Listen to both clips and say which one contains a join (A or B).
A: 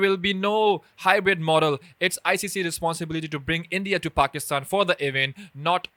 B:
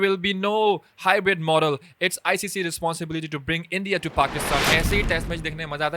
B